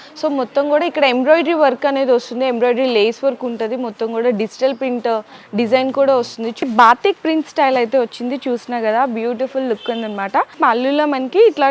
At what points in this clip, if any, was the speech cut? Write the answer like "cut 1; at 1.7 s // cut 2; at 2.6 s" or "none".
cut 1; at 6.6 s // cut 2; at 10.5 s